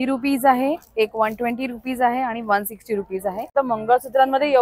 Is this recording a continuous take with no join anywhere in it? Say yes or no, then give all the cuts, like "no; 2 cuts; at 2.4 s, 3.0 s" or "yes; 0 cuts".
no; 1 cut; at 3.5 s